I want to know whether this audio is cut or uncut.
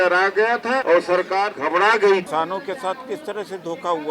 cut